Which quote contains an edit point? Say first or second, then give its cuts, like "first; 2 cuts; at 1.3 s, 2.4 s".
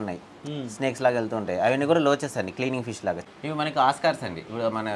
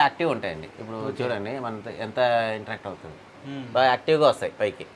first; 1 cut; at 3.2 s